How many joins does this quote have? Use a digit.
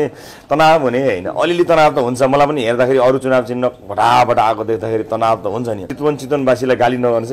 1